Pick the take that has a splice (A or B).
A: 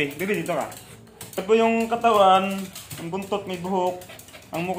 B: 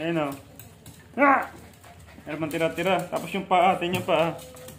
A